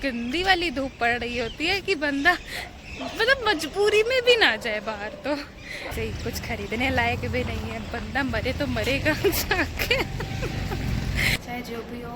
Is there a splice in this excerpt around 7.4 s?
no; 2 cuts; at 5.9 s, 11.4 s

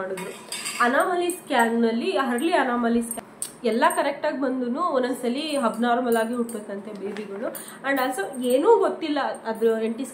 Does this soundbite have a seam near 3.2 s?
yes; 1 cut; at 3.2 s

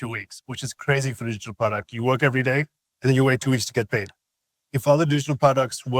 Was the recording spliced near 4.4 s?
no; 1 cut; at 2.8 s

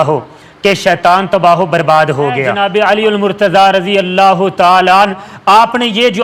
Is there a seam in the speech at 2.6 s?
yes; 1 cut; at 2.6 s

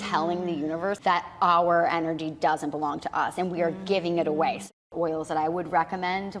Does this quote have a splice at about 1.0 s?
yes; 2 cuts; at 1.0 s, 4.7 s

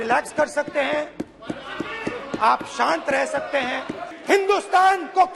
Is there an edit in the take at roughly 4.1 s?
yes; 1 cut; at 4.1 s

